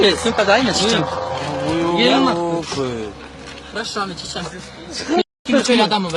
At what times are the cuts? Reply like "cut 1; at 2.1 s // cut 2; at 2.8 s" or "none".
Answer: cut 1; at 5.2 s